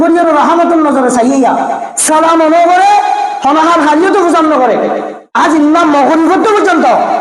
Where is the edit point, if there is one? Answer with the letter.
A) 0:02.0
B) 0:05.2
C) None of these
B